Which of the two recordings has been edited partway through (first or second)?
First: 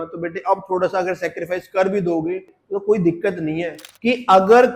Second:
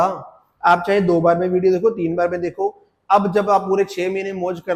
first